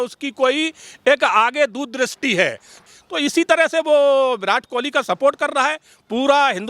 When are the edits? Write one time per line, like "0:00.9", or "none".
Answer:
0:02.7